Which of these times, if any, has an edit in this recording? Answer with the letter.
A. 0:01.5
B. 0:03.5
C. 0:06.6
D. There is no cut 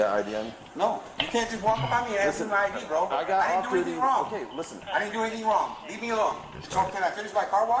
C